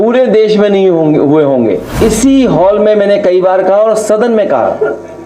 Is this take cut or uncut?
cut